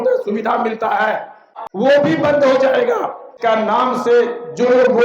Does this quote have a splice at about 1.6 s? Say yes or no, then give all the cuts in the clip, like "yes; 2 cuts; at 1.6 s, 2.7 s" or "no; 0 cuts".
yes; 2 cuts; at 1.6 s, 3.4 s